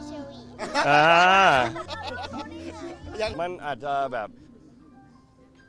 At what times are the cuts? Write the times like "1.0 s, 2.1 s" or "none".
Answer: 1.9 s